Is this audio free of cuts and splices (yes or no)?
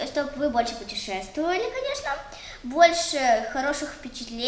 yes